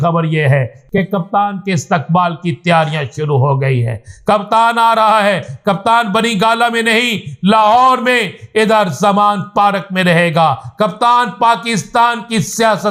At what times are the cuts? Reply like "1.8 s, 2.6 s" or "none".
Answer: none